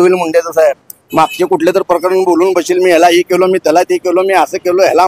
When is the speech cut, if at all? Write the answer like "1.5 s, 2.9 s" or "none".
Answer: none